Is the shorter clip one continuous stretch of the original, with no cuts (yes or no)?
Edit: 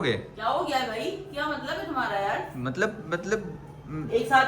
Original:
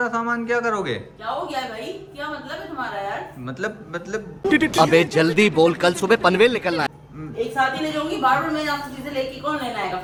no